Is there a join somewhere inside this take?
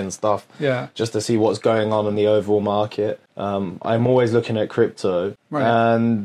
yes; 2 cuts; at 3.3 s, 5.3 s

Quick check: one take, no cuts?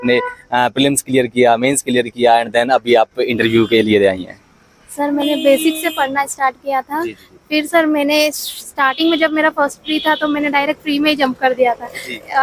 yes; 0 cuts

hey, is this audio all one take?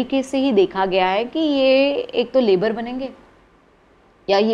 yes; 0 cuts

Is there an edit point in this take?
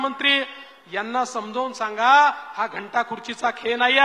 no; 0 cuts

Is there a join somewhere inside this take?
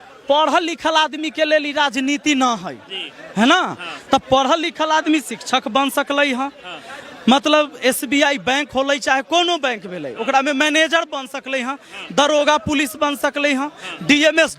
no; 0 cuts

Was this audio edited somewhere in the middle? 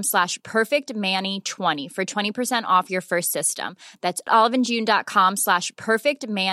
yes; 1 cut; at 1.8 s

